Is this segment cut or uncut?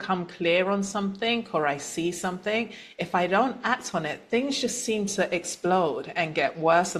uncut